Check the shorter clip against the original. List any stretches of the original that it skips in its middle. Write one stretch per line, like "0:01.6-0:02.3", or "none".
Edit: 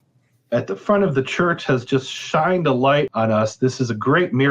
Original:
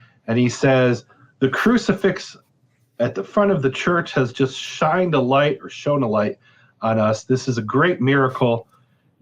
0:05.6-0:06.8